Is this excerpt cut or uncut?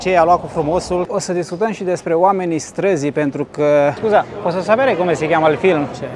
cut